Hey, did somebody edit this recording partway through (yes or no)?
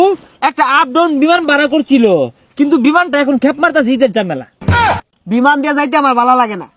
yes